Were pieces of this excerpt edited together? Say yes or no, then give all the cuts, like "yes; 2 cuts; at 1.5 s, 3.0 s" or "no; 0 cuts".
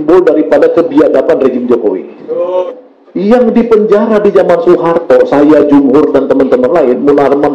yes; 1 cut; at 2.7 s